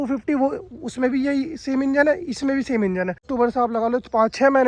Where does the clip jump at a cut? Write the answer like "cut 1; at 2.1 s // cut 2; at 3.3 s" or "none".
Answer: cut 1; at 3.3 s